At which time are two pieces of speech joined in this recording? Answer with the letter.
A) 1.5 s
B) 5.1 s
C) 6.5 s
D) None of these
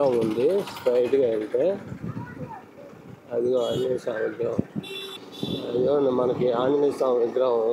B